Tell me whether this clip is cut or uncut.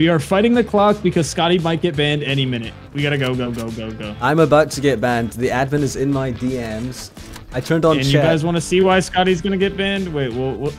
uncut